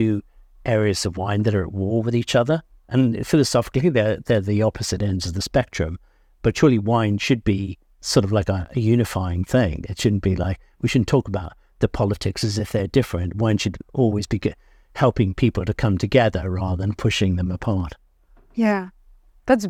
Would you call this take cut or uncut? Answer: uncut